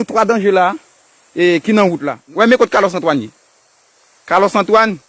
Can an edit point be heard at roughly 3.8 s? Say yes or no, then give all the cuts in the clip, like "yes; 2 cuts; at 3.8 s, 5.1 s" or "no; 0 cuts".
no; 1 cut; at 2.1 s